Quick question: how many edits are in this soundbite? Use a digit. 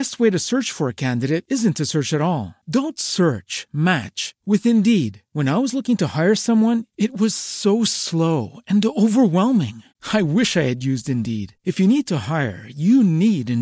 0